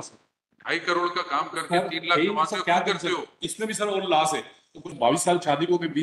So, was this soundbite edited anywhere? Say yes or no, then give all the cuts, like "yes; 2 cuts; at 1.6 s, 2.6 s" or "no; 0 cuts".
yes; 1 cut; at 4.9 s